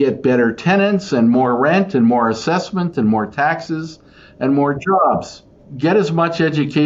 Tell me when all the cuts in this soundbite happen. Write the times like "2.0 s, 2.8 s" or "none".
5.6 s